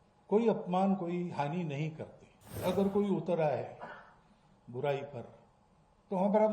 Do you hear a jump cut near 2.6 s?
yes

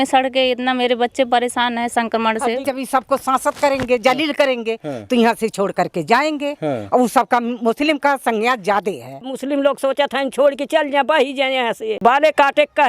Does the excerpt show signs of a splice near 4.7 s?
no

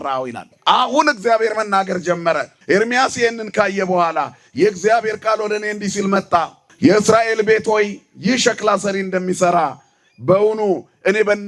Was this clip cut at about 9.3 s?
no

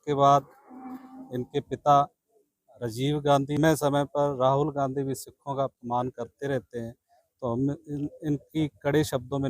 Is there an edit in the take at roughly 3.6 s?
yes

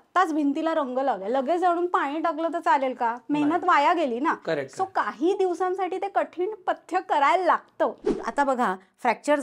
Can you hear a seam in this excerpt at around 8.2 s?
yes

